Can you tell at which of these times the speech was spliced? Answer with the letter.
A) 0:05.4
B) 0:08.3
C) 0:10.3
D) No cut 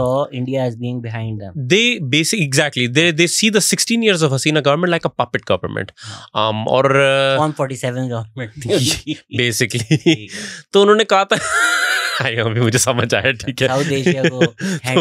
D